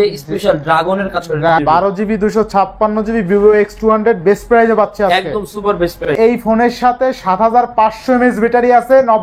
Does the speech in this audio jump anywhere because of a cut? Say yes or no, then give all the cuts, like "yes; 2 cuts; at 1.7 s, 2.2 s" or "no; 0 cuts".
yes; 2 cuts; at 1.5 s, 6.1 s